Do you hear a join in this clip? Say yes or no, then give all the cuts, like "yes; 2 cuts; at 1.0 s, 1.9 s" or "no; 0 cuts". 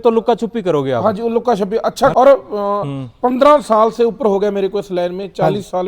yes; 1 cut; at 2.1 s